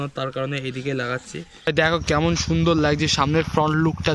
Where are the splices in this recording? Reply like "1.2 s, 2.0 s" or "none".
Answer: 1.6 s